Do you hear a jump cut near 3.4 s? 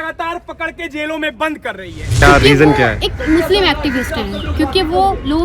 no; 1 cut; at 2.1 s

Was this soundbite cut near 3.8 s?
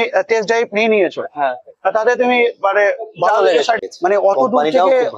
yes; 1 cut; at 3.8 s

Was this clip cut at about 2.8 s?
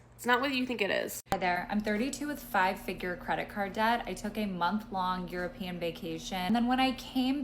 no; 2 cuts; at 1.2 s, 6.5 s

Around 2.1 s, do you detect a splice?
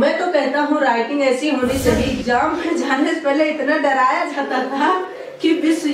yes; 1 cut; at 2.1 s

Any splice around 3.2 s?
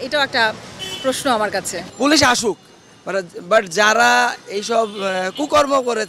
no; 1 cut; at 1.8 s

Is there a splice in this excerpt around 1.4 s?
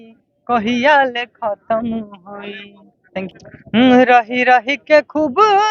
no; 1 cut; at 3.3 s

